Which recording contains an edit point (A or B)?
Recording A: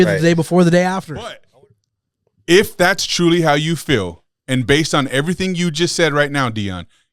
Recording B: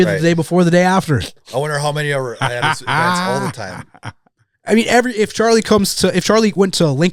A